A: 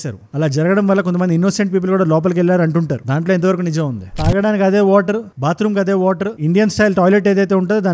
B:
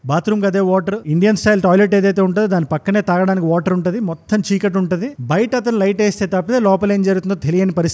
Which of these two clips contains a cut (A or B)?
A